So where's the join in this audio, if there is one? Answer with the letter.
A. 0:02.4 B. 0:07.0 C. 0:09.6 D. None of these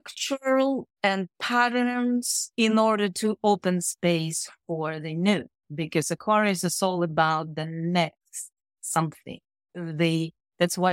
A